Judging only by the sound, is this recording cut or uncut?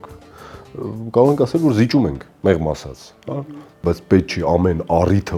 cut